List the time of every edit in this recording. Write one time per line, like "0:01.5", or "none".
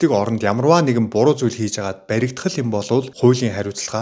none